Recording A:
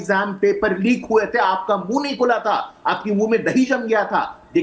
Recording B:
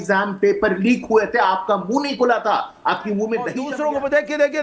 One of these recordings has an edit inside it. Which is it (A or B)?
B